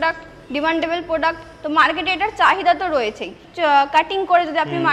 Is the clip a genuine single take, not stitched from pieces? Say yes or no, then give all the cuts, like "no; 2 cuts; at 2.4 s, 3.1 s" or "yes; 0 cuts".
no; 1 cut; at 3.4 s